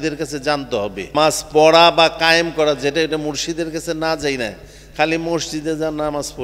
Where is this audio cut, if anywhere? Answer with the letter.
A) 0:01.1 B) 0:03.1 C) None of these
A